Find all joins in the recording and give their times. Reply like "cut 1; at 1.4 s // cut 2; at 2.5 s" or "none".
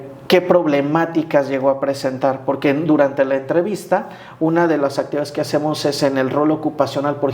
none